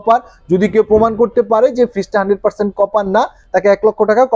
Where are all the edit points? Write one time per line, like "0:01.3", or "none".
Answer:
none